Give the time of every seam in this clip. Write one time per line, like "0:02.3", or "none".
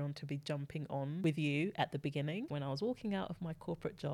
0:01.2
0:02.4